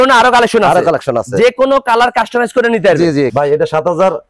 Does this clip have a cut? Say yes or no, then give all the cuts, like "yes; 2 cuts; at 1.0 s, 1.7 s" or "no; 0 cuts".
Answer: yes; 1 cut; at 3.3 s